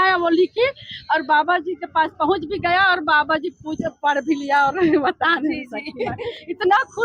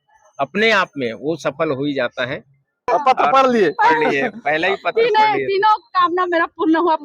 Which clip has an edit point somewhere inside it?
second; 1 cut; at 2.9 s

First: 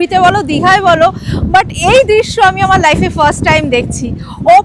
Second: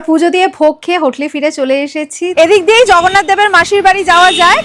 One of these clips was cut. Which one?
second; 1 cut; at 2.3 s

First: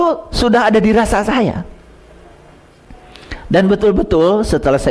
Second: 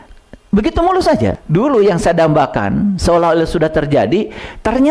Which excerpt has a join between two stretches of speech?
second; 1 cut; at 1.4 s

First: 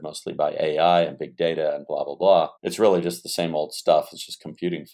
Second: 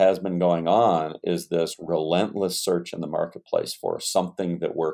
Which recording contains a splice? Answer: first; 1 cut; at 2.6 s

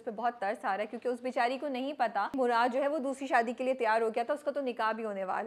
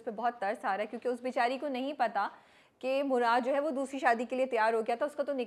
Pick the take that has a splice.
first; 1 cut; at 2.3 s

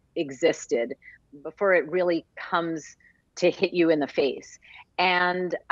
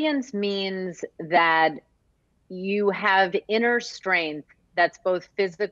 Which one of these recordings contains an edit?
first; 1 cut; at 1.1 s

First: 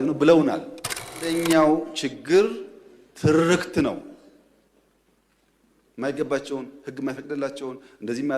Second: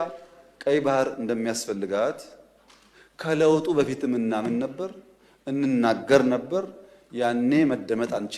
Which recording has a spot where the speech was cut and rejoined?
first; 1 cut; at 1.3 s

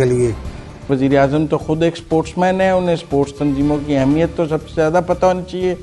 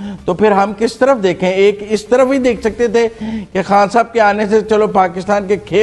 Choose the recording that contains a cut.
first; 1 cut; at 0.9 s

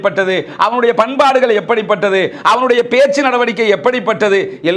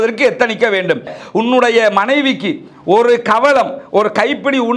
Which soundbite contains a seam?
second; 1 cut; at 1.1 s

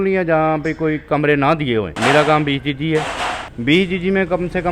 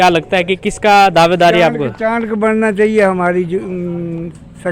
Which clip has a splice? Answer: first; 2 cuts; at 1.9 s, 3.5 s

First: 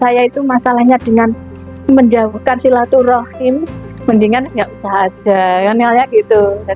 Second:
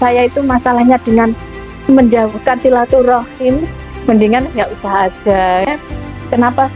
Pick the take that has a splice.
second; 1 cut; at 5.6 s

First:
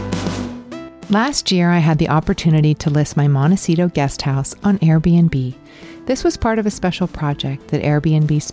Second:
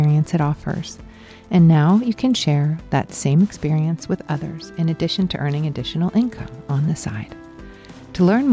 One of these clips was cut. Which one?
first; 1 cut; at 0.9 s

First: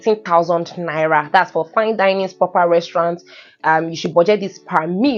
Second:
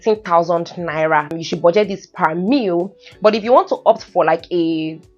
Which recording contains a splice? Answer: second; 1 cut; at 1.3 s

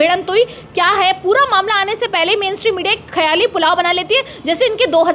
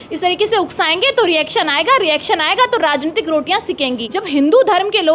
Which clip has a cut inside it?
second; 1 cut; at 4.1 s

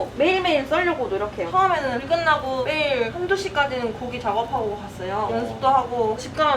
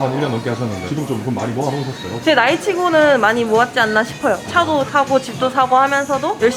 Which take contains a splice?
first; 1 cut; at 1.5 s

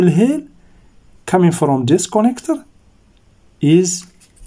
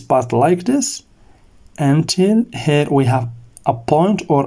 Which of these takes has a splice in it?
second; 1 cut; at 1.7 s

